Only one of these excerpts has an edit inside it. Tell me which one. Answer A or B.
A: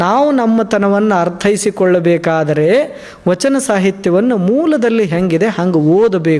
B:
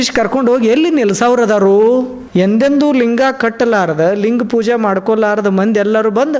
B